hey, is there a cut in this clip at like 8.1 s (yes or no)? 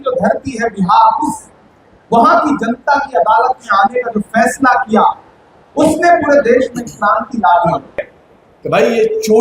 yes